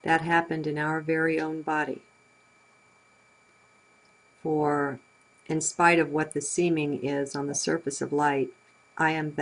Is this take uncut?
no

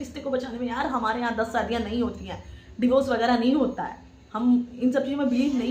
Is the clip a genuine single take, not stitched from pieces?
yes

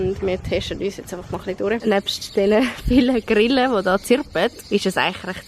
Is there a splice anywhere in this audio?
yes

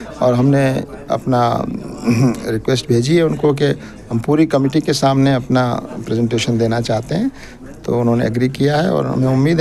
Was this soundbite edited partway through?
no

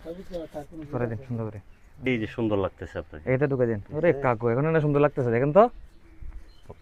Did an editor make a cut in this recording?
yes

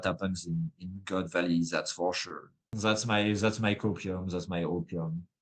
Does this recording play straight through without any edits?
no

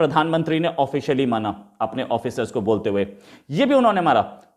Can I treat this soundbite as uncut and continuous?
yes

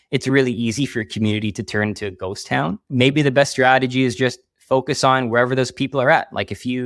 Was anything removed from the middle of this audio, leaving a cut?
yes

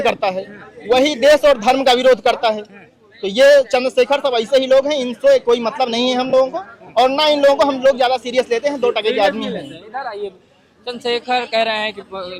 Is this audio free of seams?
yes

